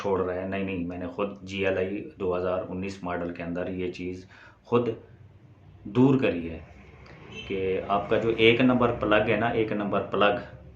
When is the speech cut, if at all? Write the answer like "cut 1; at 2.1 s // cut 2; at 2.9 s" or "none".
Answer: none